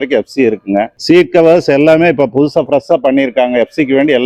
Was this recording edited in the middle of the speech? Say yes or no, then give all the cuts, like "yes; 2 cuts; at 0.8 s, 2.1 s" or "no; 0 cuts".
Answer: no; 0 cuts